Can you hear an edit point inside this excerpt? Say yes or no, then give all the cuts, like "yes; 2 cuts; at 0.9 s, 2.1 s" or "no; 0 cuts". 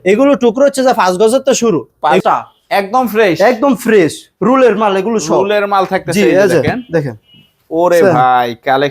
yes; 1 cut; at 2.2 s